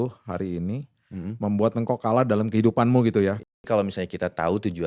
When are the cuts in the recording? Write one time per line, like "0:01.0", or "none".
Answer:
0:03.4

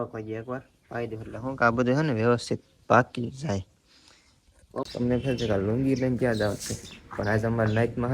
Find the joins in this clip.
0:04.9

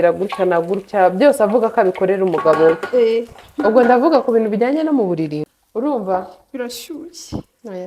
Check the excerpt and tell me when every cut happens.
0:05.5

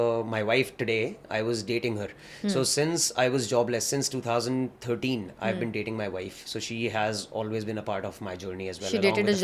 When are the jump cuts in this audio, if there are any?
none

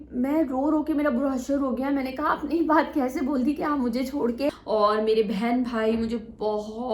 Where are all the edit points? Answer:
0:04.6

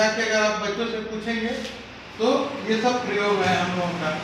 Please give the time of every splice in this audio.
none

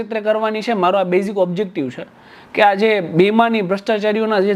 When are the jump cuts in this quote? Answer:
none

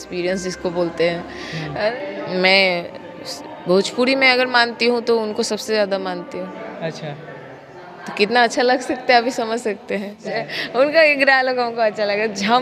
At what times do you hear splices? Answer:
0:01.9
0:10.2

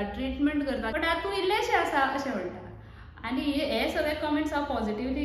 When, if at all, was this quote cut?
0:00.9

